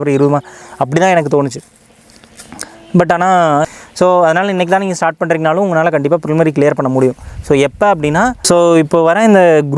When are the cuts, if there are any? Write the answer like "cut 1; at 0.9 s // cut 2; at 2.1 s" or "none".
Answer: cut 1; at 3.6 s // cut 2; at 8.4 s

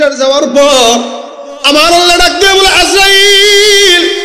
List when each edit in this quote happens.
none

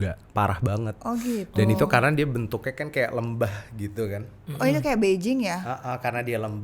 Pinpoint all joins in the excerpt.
none

